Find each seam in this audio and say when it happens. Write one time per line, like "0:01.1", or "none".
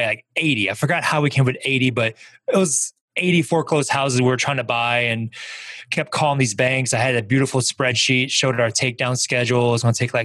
none